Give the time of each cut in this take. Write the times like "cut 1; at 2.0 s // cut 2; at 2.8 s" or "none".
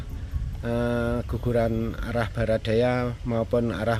none